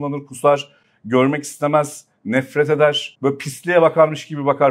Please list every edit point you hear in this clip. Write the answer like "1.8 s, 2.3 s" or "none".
3.1 s